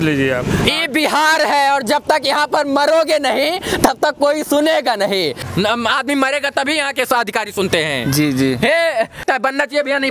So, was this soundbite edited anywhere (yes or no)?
yes